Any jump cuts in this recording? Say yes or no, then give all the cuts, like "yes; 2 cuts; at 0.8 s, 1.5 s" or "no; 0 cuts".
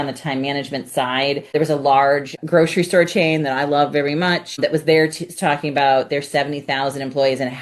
yes; 3 cuts; at 1.5 s, 2.4 s, 4.6 s